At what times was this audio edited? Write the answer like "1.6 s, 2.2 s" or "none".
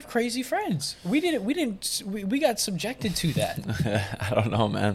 none